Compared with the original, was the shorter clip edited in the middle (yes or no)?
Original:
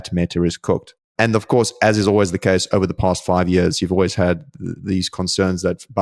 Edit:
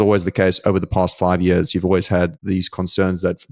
yes